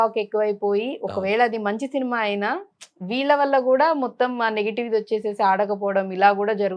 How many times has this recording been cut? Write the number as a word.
zero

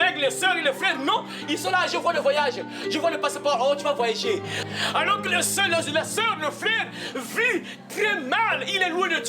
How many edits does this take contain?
one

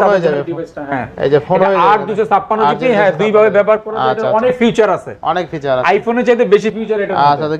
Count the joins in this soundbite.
zero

